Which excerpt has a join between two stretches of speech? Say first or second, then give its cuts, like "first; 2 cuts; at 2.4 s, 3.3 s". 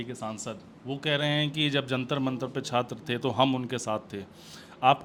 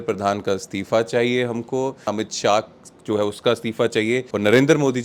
second; 2 cuts; at 2.1 s, 4.3 s